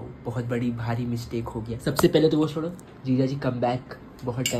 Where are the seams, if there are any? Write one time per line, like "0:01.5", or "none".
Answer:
none